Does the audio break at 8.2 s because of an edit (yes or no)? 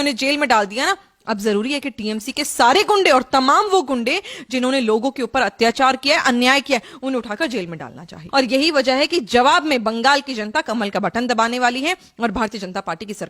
yes